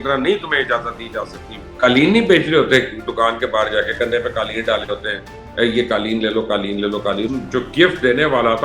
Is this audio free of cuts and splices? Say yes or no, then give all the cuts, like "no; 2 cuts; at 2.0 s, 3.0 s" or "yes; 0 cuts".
no; 2 cuts; at 1.7 s, 7.3 s